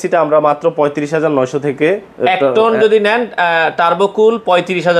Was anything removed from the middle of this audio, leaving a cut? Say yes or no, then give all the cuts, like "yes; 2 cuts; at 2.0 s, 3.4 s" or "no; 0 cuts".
no; 0 cuts